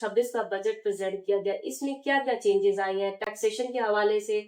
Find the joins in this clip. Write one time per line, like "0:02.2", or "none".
none